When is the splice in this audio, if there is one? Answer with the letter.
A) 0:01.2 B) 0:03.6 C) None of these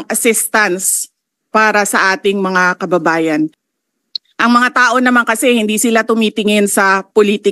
B